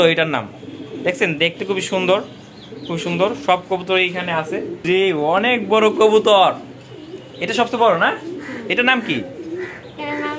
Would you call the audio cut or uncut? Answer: cut